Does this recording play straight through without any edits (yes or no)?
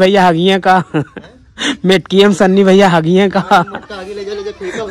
yes